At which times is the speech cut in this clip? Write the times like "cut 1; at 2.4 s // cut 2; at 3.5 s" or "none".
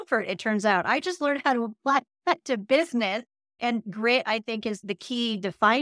cut 1; at 3.6 s // cut 2; at 4.8 s